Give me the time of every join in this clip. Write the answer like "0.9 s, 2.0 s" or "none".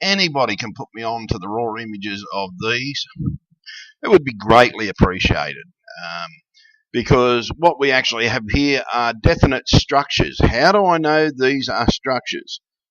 none